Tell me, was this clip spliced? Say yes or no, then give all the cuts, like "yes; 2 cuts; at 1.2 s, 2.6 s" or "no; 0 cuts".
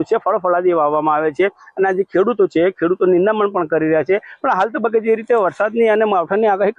yes; 1 cut; at 5.2 s